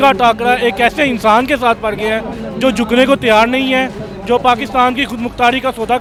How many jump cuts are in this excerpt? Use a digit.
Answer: 0